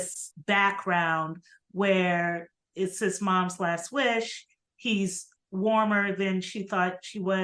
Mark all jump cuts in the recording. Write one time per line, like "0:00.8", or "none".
none